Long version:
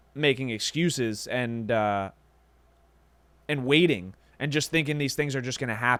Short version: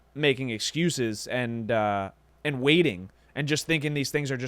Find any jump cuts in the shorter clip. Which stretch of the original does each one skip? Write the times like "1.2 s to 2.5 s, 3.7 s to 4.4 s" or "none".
2.2 s to 3.3 s